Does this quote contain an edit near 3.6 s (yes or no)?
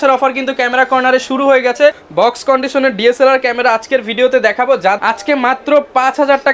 no